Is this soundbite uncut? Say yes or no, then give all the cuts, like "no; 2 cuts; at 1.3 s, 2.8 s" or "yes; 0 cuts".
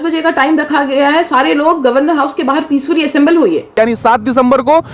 no; 1 cut; at 3.7 s